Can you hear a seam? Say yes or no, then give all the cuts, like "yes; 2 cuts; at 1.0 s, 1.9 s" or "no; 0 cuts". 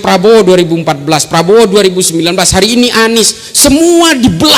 no; 0 cuts